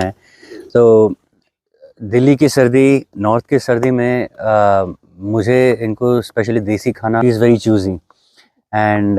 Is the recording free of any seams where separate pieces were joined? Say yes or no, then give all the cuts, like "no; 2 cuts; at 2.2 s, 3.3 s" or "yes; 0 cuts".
no; 1 cut; at 7.2 s